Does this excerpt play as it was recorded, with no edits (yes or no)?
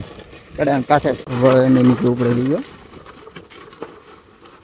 no